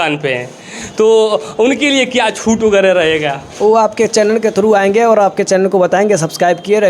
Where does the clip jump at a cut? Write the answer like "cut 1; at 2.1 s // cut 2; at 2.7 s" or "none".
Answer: none